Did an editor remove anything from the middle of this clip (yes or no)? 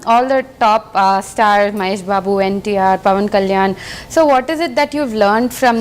no